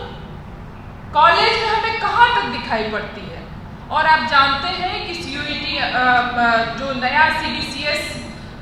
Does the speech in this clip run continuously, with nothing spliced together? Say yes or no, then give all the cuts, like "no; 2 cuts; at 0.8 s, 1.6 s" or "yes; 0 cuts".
yes; 0 cuts